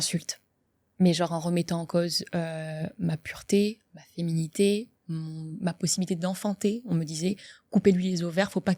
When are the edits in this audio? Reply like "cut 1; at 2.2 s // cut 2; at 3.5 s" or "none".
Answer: none